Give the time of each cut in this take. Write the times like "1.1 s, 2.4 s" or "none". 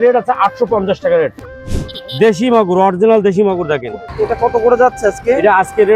1.4 s, 4.0 s